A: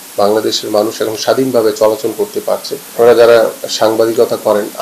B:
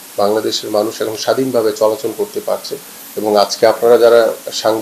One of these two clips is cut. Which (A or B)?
A